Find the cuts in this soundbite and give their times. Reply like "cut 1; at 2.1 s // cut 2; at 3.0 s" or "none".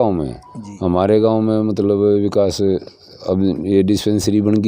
none